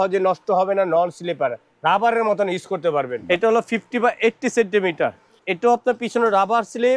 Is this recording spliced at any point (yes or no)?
yes